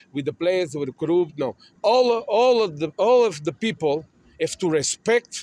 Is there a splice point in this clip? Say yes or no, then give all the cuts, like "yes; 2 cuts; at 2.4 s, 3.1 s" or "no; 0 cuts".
yes; 1 cut; at 1.7 s